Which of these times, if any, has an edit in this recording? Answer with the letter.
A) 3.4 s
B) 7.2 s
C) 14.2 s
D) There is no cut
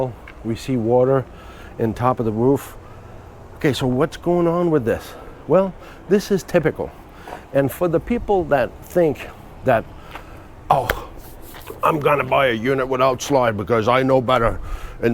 D